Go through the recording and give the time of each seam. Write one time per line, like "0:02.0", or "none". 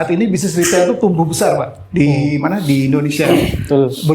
none